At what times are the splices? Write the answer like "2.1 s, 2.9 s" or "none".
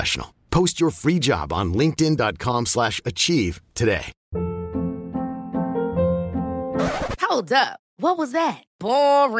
none